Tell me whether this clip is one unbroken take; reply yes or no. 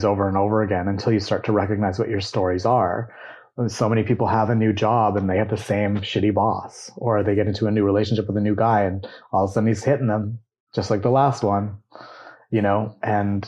yes